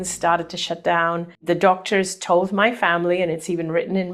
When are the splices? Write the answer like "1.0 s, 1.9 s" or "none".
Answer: 1.3 s